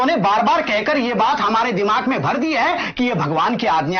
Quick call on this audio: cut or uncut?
uncut